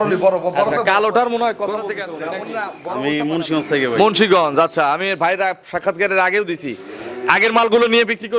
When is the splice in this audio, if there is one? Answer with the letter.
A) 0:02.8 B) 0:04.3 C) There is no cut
A